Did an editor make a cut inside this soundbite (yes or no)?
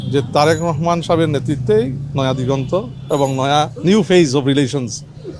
no